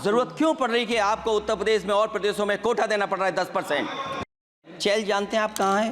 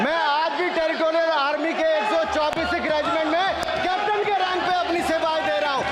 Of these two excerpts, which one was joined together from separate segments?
first; 1 cut; at 4.6 s

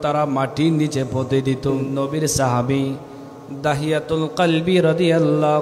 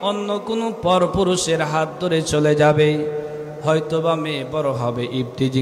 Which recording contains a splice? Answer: first; 1 cut; at 1.8 s

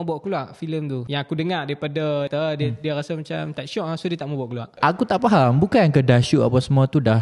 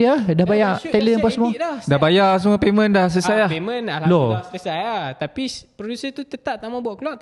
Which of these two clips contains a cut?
first; 3 cuts; at 1.0 s, 2.3 s, 4.7 s

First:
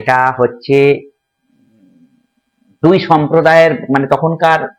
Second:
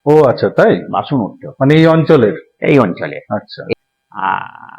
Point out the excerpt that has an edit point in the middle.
second; 1 cut; at 3.8 s

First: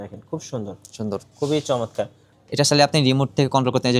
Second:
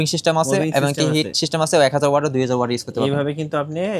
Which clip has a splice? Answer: first; 1 cut; at 2.2 s

